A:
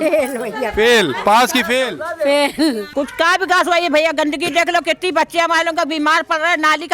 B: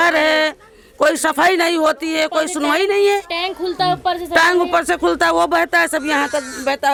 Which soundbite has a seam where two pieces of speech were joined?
A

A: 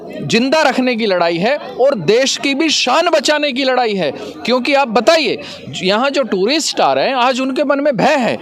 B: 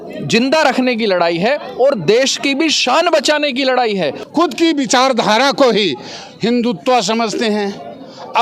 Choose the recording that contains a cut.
B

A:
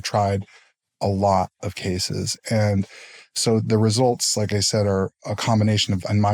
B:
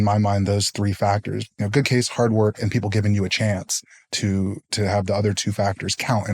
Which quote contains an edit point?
B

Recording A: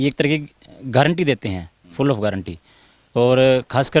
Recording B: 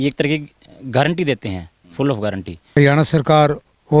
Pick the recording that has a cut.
B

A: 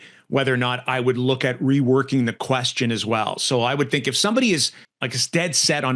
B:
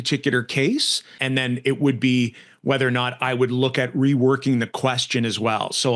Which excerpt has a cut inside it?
B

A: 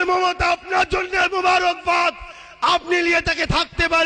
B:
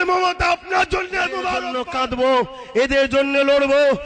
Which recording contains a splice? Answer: B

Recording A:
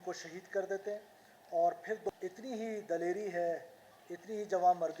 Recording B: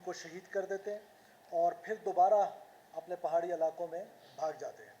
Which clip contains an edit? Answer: A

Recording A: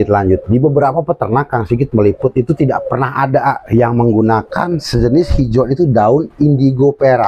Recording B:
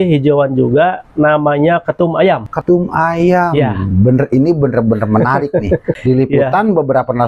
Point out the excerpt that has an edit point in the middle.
B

